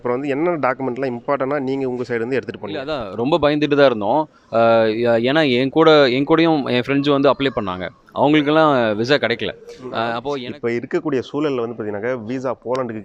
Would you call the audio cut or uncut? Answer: cut